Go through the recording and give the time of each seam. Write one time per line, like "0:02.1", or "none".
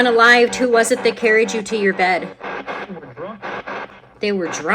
0:02.4
0:03.9